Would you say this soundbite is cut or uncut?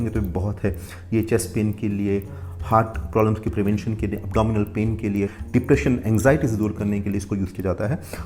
uncut